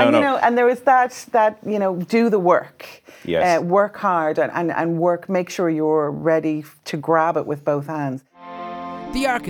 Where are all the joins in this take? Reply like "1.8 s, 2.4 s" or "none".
8.4 s